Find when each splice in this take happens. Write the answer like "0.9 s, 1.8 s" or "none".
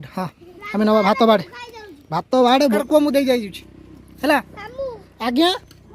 2.8 s